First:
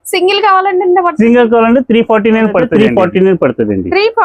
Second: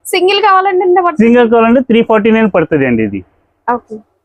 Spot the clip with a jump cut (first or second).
first